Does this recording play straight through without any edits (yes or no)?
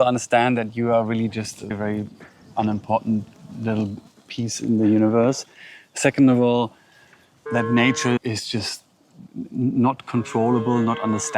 yes